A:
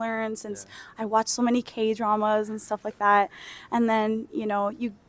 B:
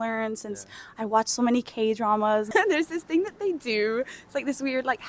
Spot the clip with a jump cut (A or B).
B